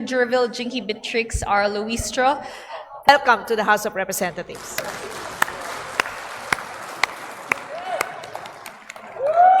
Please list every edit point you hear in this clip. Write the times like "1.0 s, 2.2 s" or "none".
3.1 s